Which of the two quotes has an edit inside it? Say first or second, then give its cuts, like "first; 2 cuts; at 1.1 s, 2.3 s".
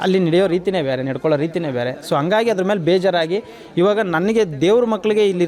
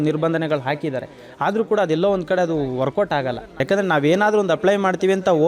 second; 1 cut; at 3.6 s